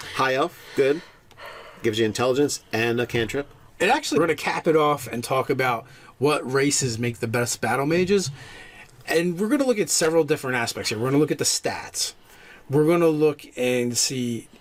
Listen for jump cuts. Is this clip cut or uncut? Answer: uncut